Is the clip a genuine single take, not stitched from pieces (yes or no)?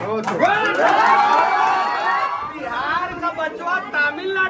no